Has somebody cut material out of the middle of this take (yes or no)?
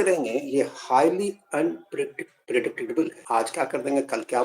yes